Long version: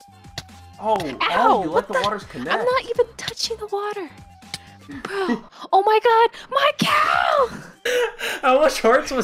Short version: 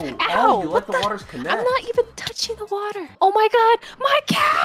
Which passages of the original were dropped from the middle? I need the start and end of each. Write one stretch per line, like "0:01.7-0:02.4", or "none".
0:04.1-0:05.6